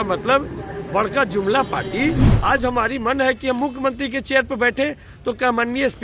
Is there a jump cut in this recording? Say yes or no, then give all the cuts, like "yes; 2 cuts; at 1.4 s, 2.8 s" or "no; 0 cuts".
yes; 1 cut; at 2.3 s